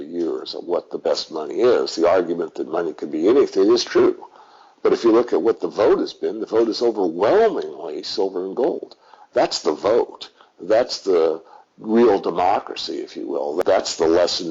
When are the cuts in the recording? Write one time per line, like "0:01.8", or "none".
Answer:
0:13.6

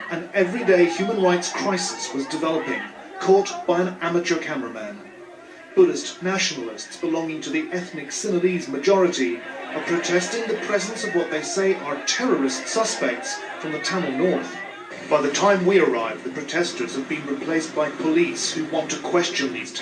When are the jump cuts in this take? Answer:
none

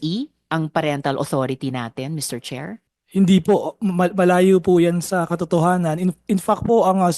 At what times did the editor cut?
0:02.9

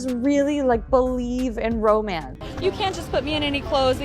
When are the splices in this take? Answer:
0:02.3

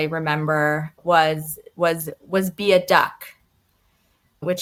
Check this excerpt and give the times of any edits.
none

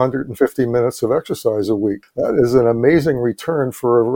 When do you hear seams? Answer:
0:02.0

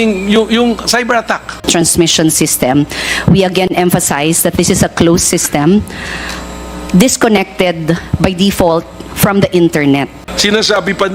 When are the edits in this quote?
0:01.6
0:10.3

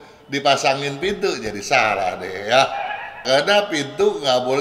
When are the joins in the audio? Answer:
0:03.2

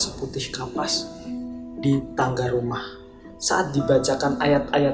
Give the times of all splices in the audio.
0:03.5

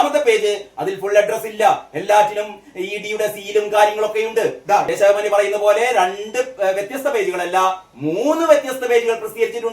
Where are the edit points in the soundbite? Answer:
0:04.9

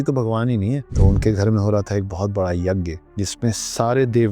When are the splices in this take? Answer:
0:00.9
0:03.0

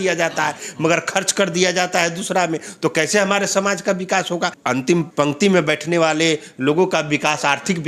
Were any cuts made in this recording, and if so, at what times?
0:04.9

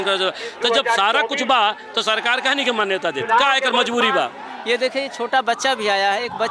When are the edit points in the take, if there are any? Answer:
0:04.5

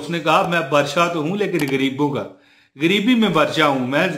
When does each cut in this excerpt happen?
none

